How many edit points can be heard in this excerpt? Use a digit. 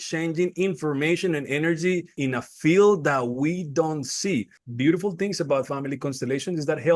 2